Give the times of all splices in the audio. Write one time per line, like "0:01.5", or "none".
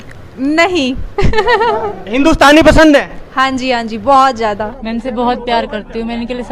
0:04.8